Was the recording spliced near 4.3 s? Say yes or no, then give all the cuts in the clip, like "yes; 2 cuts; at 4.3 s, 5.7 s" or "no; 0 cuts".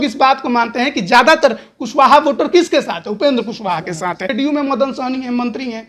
yes; 1 cut; at 4.3 s